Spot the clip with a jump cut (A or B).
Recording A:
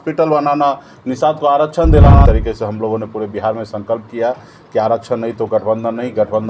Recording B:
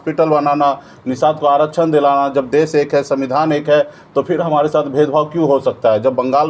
A